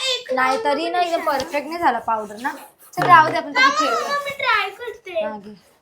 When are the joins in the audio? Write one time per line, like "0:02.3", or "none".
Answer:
none